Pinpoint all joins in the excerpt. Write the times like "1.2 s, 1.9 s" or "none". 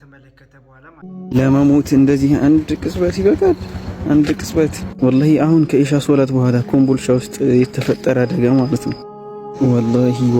1.0 s